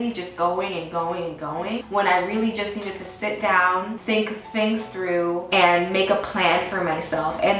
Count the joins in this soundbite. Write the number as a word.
three